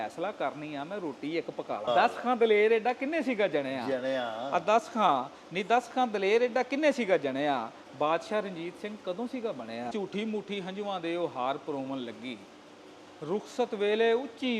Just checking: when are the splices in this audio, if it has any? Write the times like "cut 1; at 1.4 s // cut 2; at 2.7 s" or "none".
cut 1; at 1.9 s // cut 2; at 9.9 s